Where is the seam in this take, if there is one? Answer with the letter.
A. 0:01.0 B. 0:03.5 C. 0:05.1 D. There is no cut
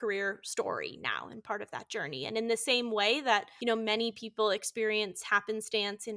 B